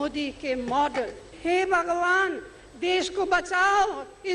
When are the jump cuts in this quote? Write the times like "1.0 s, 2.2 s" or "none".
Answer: 1.2 s